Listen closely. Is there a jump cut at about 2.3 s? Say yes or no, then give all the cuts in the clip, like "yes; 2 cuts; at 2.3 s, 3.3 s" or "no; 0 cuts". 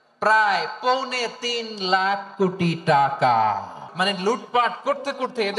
no; 1 cut; at 3.9 s